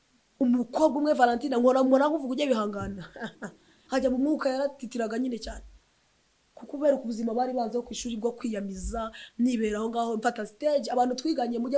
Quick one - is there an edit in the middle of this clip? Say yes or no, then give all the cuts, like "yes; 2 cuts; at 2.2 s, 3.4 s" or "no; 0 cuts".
no; 0 cuts